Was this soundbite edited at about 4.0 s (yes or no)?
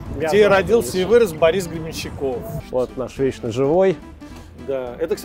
no